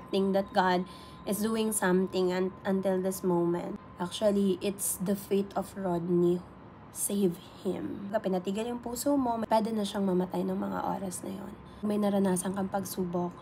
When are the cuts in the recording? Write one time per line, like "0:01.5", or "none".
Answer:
0:03.8
0:08.1
0:09.4
0:11.8